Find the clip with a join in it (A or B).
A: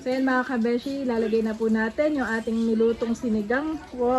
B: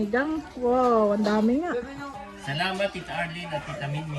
B